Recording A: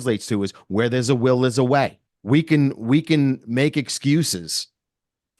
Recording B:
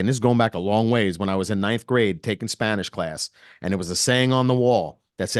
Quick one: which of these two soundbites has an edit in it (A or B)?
A